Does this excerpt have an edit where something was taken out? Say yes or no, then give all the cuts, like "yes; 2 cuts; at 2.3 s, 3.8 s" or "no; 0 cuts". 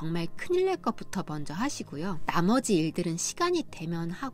no; 0 cuts